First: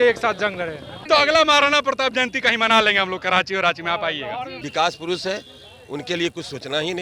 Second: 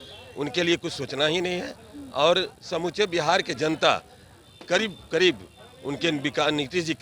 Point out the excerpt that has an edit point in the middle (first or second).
first